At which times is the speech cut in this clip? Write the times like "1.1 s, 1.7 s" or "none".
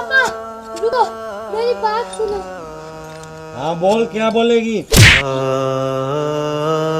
0.9 s